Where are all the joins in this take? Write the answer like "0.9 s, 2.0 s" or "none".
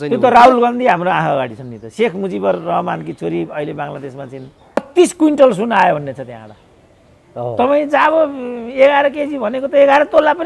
4.8 s